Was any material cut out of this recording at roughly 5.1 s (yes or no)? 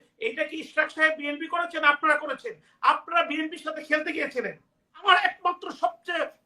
yes